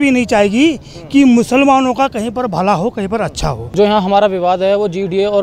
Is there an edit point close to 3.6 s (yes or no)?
yes